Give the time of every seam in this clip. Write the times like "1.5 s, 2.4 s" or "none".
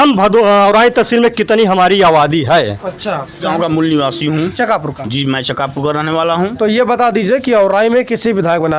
3.4 s